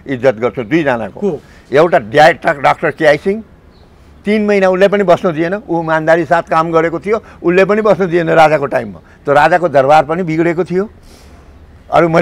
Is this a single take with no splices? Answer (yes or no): yes